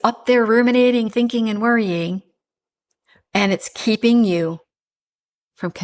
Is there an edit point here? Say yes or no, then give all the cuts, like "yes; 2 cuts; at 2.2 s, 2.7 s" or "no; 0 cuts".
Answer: no; 0 cuts